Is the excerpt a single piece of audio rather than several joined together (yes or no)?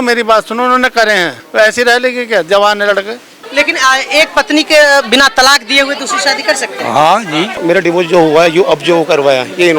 no